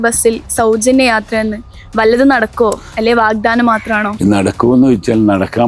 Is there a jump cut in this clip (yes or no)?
yes